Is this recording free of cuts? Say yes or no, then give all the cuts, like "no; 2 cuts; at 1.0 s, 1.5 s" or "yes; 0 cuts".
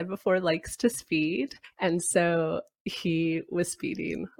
yes; 0 cuts